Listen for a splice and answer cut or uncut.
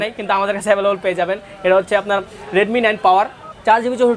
uncut